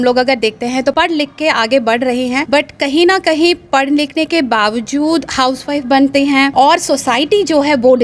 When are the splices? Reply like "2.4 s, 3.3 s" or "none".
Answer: 0.9 s, 2.4 s, 6.5 s